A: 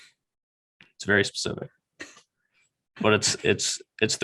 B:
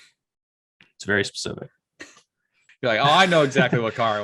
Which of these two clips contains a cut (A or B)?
B